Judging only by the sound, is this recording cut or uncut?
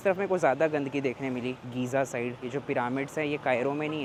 uncut